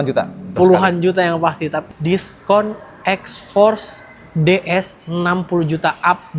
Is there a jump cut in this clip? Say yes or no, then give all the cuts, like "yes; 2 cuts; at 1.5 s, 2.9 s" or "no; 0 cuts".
yes; 1 cut; at 1.8 s